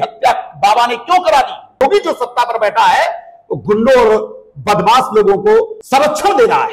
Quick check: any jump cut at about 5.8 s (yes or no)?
yes